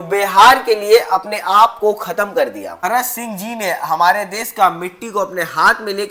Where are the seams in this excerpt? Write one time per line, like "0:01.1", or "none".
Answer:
none

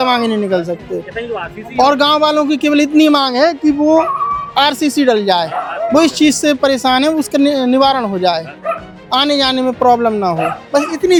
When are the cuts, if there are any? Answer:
none

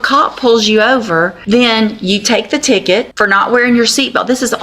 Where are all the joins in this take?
0:01.4
0:03.1

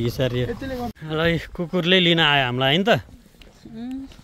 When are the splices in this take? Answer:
0:00.9

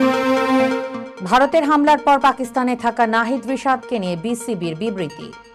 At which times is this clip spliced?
0:01.0

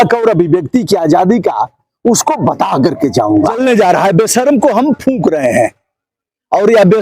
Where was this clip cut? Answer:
0:03.6

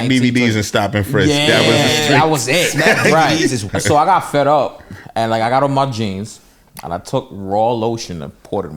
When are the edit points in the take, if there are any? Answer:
0:03.6

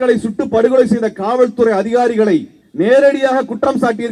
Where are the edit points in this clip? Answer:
0:02.6

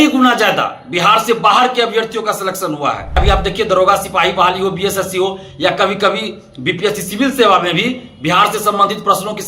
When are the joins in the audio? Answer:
0:03.2

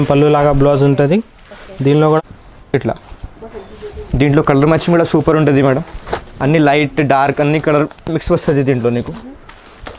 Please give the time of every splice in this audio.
0:02.2

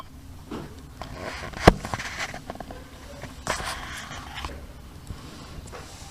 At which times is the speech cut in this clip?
0:04.7

